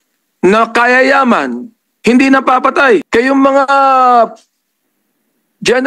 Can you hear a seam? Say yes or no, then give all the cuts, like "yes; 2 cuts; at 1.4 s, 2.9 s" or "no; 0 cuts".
yes; 1 cut; at 3.1 s